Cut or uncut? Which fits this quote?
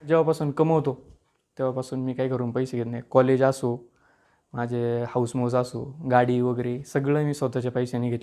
uncut